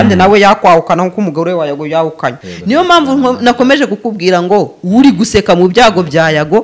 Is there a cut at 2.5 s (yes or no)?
yes